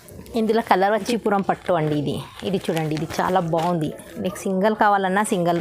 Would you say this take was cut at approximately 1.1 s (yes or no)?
yes